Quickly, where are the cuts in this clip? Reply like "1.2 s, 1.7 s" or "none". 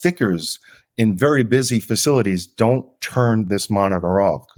none

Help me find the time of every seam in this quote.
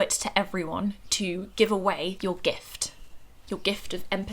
2.2 s

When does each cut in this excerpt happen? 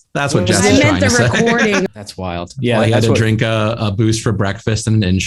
1.9 s

